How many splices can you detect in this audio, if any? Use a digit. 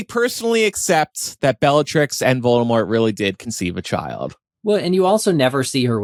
0